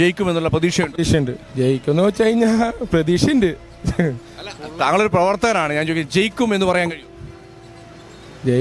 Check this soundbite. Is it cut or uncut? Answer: cut